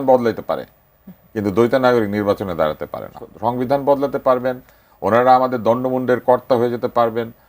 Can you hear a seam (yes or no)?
yes